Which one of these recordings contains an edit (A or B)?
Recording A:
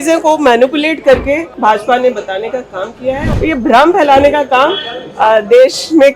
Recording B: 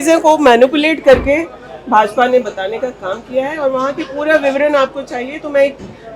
A